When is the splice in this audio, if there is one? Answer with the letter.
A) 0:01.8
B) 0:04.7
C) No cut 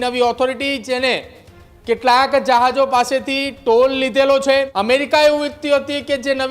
B